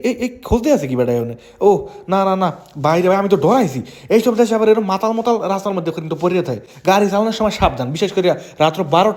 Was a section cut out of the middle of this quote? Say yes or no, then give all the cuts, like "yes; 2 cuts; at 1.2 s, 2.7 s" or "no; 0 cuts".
no; 0 cuts